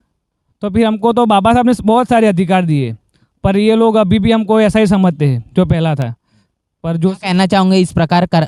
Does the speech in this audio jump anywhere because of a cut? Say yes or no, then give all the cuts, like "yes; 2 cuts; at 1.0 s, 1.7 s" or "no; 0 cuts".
no; 0 cuts